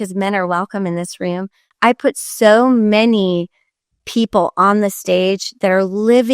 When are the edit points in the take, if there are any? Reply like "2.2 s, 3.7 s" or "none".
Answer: 1.6 s

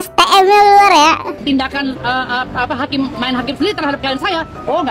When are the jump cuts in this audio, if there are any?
1.4 s

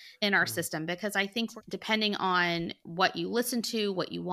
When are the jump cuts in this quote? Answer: 1.6 s, 2.8 s

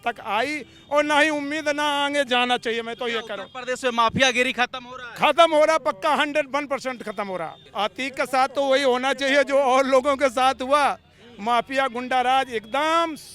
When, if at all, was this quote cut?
7.6 s

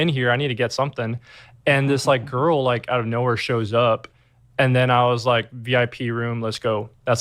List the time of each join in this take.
5.2 s

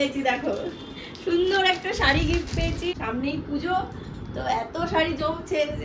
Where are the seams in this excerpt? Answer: 2.8 s

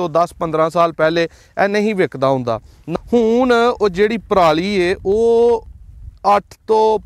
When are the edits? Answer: 2.8 s

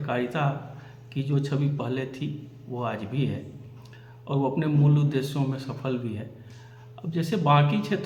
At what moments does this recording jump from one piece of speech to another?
none

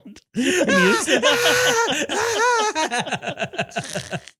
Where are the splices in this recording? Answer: none

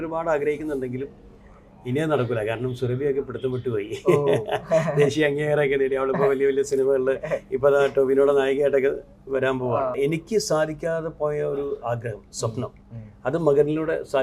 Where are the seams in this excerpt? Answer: 9.9 s

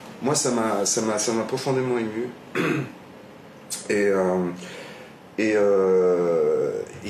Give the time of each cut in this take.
none

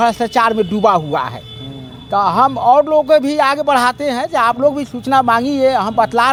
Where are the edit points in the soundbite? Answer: none

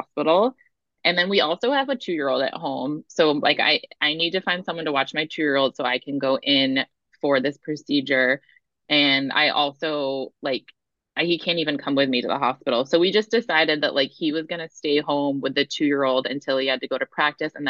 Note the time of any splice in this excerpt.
none

